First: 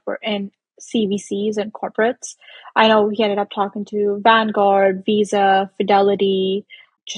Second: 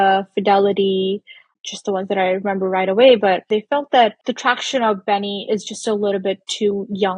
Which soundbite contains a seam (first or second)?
second